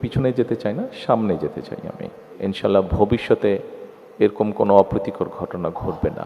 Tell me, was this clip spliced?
yes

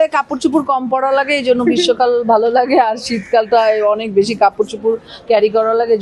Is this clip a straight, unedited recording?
yes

